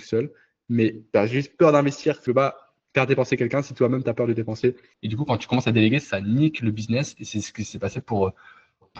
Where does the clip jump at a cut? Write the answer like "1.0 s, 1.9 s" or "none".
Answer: 1.0 s, 2.2 s, 4.9 s